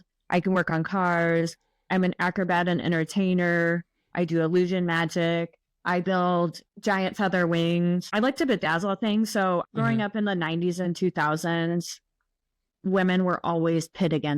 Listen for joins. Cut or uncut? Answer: cut